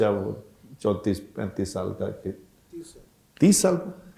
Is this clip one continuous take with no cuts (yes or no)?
yes